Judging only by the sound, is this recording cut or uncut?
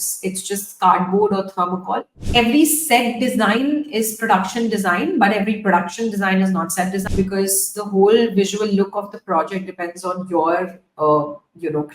cut